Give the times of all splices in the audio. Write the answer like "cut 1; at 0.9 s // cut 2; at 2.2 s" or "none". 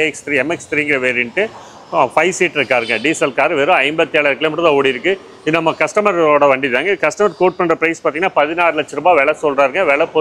none